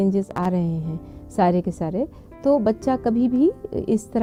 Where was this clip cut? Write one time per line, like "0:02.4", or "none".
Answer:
none